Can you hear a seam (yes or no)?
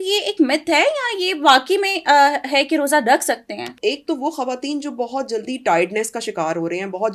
yes